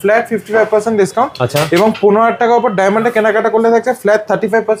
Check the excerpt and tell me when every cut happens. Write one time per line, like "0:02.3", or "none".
none